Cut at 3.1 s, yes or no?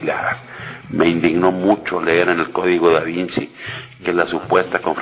yes